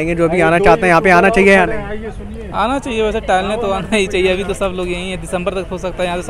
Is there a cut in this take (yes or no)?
no